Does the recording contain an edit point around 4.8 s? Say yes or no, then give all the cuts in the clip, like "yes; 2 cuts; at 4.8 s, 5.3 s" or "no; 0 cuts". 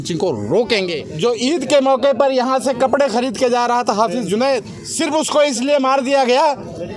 yes; 2 cuts; at 1.0 s, 4.8 s